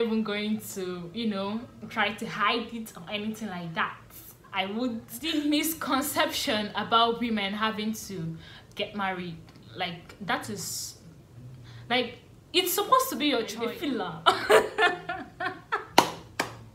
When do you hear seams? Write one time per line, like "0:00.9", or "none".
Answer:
0:05.1
0:13.6